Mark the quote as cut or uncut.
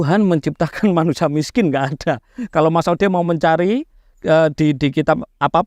uncut